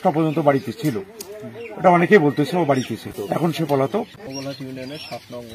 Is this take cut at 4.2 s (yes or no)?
yes